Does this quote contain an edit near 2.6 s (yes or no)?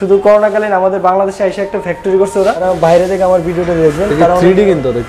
yes